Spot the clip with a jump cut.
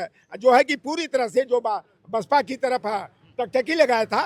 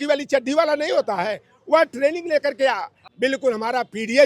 second; 1 cut; at 2.9 s

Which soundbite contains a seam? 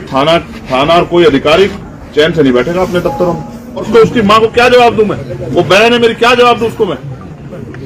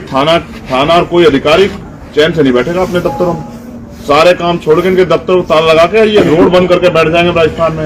first; 1 cut; at 3.9 s

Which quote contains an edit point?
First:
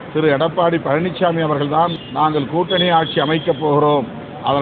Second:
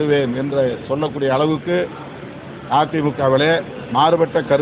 first; 1 cut; at 2.0 s

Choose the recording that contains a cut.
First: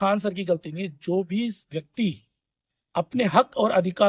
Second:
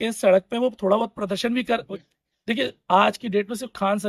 second; 1 cut; at 1.9 s

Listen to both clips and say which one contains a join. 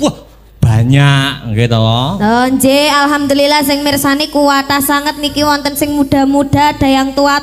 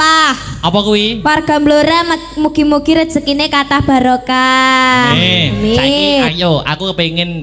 second; 1 cut; at 6.3 s

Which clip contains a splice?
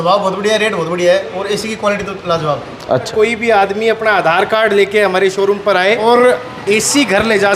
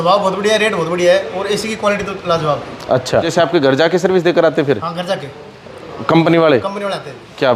first; 2 cuts; at 3.1 s, 6.0 s

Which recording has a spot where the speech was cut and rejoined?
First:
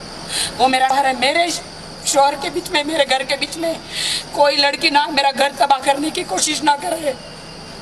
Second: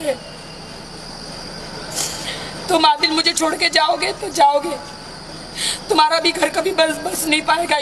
first; 1 cut; at 0.9 s

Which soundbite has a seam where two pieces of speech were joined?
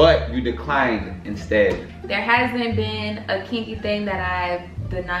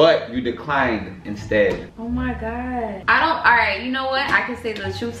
first; 1 cut; at 1.9 s

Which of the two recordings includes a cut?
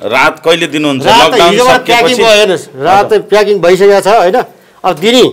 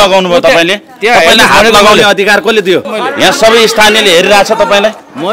second; 1 cut; at 2.9 s

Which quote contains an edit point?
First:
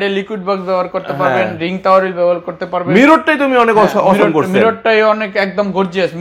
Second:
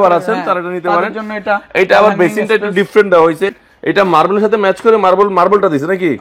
second; 1 cut; at 3.6 s

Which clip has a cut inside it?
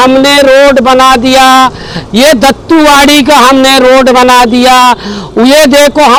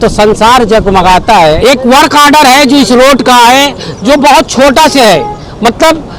second; 1 cut; at 1.6 s

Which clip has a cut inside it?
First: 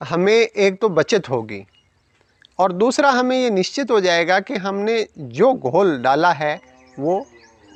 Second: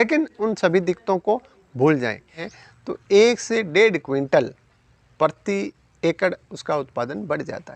second; 1 cut; at 2.5 s

